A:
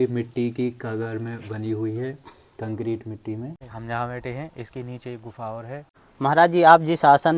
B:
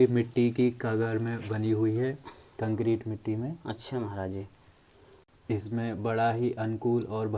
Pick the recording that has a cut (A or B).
A